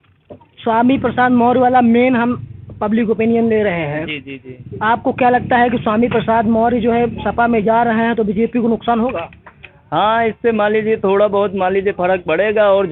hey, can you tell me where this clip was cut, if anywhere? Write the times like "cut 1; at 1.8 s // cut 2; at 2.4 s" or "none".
none